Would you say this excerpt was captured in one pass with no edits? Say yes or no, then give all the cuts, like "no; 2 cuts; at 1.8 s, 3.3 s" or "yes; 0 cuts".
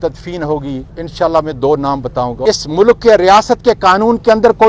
no; 2 cuts; at 0.9 s, 2.4 s